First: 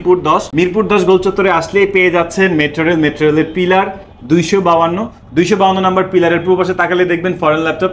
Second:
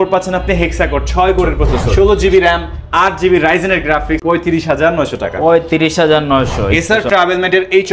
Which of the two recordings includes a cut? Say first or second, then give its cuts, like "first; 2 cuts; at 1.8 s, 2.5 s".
second; 3 cuts; at 1.8 s, 4.2 s, 6.7 s